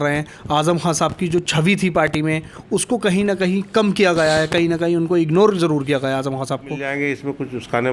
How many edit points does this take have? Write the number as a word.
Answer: one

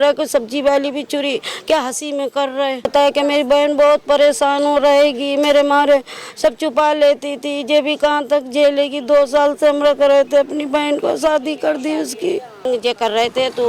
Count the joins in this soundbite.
two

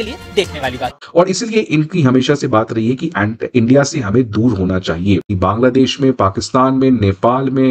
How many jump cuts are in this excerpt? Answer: two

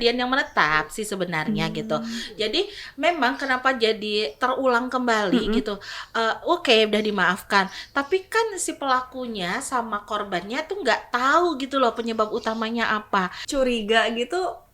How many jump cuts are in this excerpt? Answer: one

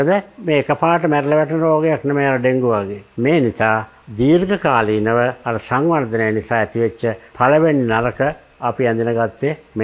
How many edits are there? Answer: zero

